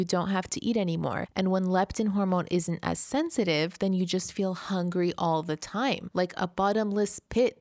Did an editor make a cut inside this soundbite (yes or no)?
yes